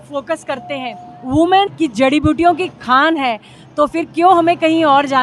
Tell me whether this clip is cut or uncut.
cut